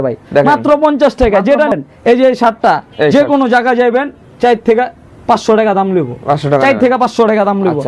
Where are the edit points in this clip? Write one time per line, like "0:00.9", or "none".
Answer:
0:01.7